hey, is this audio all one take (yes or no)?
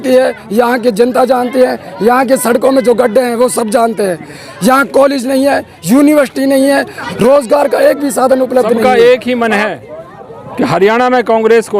no